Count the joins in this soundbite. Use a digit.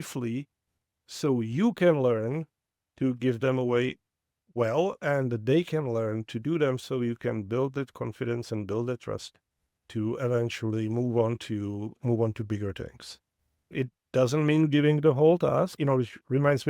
2